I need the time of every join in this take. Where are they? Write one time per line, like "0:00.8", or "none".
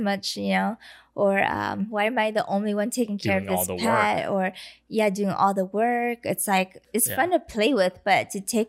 0:06.8